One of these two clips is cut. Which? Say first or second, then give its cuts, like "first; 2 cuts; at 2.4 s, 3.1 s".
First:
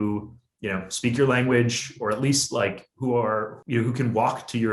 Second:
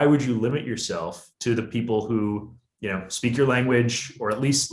first; 1 cut; at 3.5 s